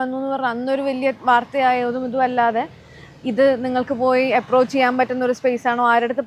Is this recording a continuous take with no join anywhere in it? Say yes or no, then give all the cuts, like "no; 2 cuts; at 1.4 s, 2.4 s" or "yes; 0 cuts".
yes; 0 cuts